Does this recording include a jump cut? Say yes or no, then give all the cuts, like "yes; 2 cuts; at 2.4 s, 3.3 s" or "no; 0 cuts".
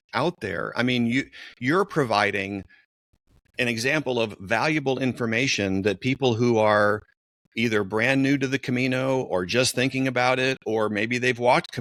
no; 0 cuts